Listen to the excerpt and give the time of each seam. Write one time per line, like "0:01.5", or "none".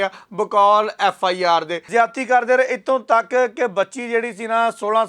0:01.8